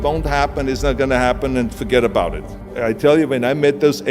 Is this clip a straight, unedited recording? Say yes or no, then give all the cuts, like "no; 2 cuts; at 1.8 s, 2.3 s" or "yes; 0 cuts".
no; 1 cut; at 2.7 s